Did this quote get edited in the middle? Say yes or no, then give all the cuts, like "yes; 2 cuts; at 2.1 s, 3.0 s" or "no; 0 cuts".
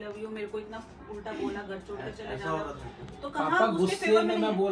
no; 0 cuts